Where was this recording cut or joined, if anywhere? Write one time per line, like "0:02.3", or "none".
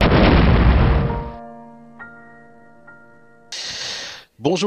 0:03.4

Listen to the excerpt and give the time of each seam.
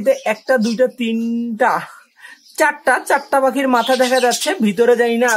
none

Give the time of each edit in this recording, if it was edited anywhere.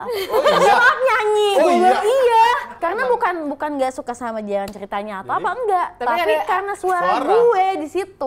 0:02.7

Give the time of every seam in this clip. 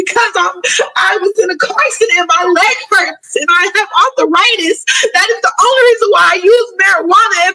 none

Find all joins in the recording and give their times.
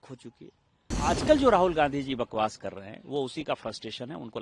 0:00.9

